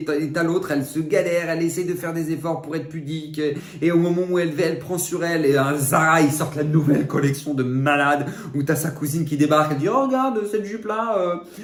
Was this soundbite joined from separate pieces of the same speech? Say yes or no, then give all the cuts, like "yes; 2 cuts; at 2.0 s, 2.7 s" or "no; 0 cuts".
no; 0 cuts